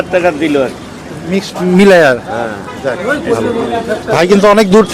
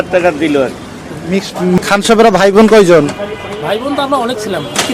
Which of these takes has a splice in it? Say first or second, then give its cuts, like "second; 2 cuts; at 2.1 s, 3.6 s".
second; 1 cut; at 1.8 s